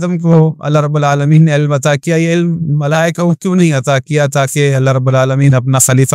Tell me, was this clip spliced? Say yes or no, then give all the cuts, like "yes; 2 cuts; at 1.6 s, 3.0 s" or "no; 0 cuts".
no; 0 cuts